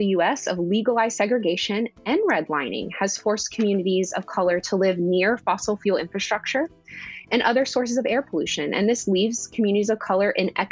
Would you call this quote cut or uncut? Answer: cut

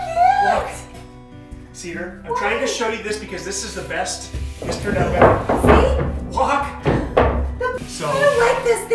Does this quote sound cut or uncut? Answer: cut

